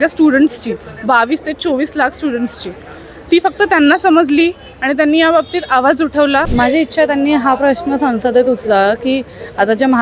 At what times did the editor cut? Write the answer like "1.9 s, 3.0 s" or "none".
6.5 s